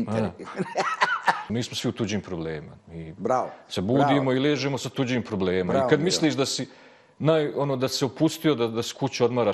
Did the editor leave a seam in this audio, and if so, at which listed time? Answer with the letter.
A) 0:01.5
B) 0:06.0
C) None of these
A